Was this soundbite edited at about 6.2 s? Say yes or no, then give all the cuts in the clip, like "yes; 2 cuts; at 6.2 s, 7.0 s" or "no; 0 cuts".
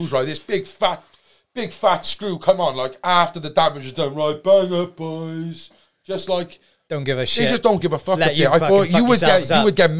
no; 0 cuts